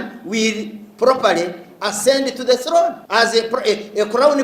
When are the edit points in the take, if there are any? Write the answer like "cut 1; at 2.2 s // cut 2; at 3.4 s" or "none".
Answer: cut 1; at 3.0 s